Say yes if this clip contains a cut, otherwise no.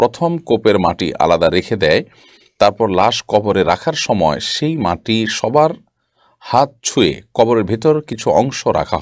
no